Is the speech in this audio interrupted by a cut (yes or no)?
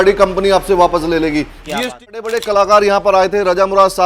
yes